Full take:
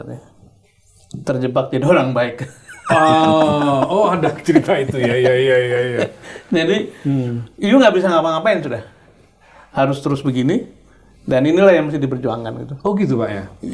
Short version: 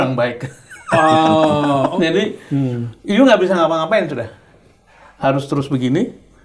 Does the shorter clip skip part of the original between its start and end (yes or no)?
yes